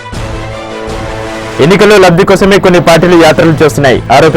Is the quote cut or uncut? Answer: cut